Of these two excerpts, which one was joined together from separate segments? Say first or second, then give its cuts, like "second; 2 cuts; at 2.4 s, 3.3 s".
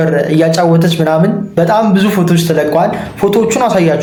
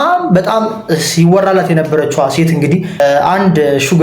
second; 1 cut; at 3.0 s